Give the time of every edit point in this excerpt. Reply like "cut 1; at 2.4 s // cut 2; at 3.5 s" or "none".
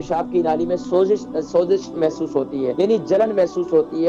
cut 1; at 2.7 s